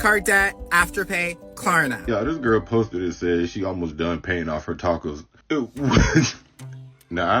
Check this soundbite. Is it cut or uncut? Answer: cut